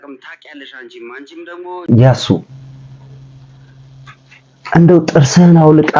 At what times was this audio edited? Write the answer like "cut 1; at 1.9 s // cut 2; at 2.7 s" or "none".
cut 1; at 1.8 s